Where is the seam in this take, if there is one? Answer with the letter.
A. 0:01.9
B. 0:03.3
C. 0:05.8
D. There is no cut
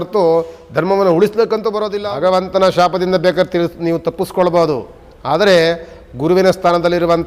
A